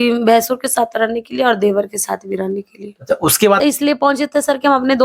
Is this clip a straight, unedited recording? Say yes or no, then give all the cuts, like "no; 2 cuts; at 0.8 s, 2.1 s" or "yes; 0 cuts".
no; 1 cut; at 3.6 s